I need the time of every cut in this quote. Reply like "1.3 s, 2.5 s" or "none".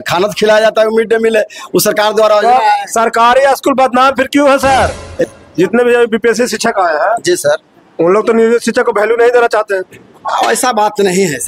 5.4 s